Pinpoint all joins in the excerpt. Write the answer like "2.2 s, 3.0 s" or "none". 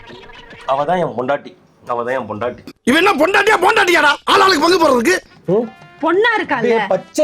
5.3 s